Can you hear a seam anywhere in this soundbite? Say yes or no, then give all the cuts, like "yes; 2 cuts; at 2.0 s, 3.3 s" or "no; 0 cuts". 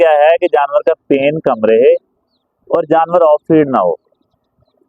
no; 0 cuts